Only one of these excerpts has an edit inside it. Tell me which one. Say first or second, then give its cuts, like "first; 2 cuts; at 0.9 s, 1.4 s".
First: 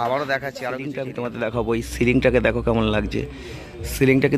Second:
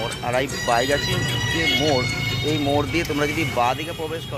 first; 1 cut; at 1.0 s